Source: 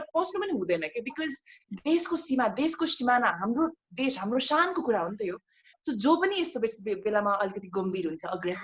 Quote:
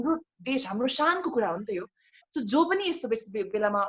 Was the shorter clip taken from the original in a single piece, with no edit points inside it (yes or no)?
yes